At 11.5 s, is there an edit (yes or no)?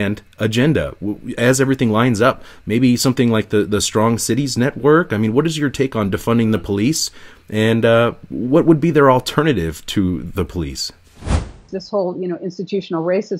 yes